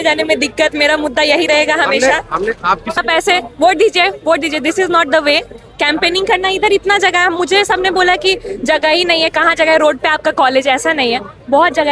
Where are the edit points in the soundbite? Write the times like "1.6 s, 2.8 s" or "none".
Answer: 3.0 s